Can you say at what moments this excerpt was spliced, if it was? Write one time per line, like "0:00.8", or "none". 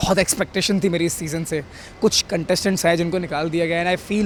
none